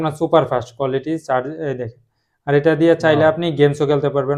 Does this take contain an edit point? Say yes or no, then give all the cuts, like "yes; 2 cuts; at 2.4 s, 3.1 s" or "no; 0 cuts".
no; 0 cuts